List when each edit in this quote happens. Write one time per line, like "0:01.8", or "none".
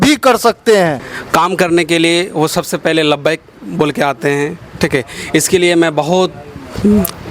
0:01.1